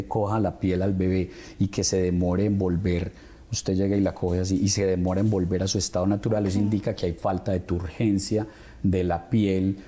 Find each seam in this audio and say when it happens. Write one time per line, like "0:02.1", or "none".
none